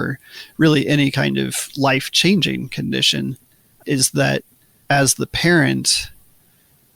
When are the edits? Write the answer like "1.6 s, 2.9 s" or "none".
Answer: none